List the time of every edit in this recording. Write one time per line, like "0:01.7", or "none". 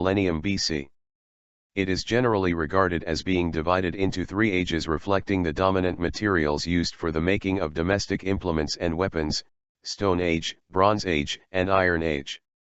none